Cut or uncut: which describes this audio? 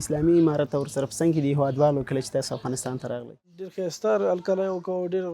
cut